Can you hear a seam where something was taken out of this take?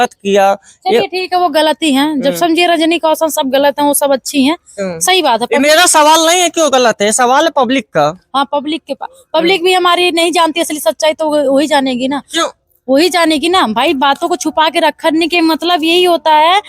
no; 0 cuts

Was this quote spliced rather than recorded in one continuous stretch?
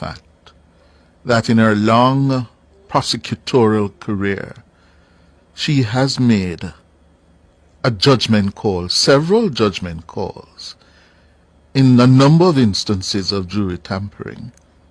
no; 0 cuts

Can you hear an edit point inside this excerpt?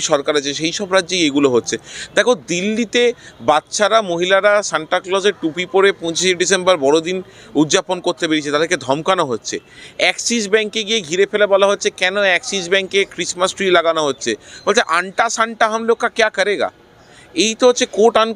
no; 0 cuts

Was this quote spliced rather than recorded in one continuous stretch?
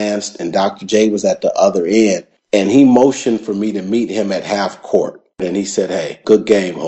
yes; 1 cut; at 5.7 s

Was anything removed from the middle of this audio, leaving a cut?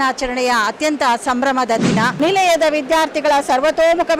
yes; 1 cut; at 2.1 s

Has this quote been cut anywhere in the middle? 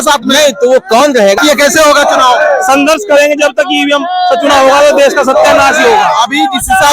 yes; 1 cut; at 1.4 s

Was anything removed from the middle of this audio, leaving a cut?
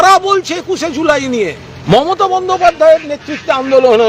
yes; 1 cut; at 1.7 s

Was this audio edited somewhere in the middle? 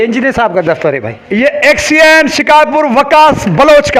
no; 0 cuts

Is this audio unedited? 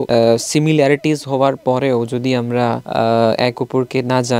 yes; 0 cuts

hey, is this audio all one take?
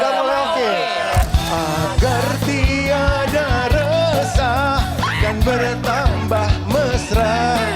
no; 1 cut; at 1.2 s

